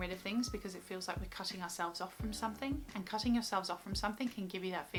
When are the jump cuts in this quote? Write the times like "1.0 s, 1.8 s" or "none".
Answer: none